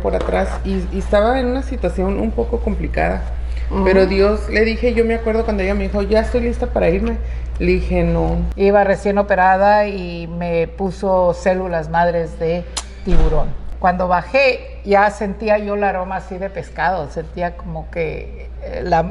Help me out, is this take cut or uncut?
cut